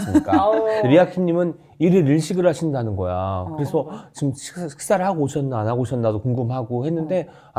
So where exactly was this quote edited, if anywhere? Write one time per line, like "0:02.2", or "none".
none